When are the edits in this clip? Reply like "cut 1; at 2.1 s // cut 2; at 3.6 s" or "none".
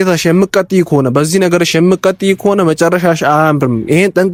none